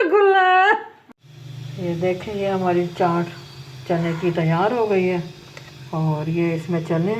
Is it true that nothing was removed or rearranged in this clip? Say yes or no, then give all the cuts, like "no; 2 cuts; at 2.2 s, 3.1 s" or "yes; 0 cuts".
no; 1 cut; at 0.9 s